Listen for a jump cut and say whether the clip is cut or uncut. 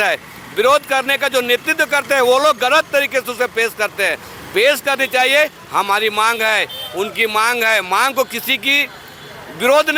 uncut